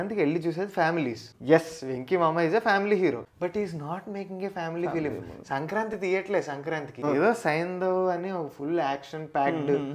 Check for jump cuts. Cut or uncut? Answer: cut